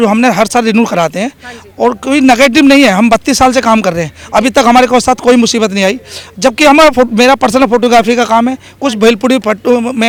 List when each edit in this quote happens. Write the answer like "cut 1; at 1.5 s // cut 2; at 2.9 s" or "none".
none